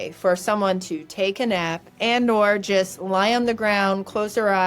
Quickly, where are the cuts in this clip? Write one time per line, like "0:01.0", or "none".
0:01.8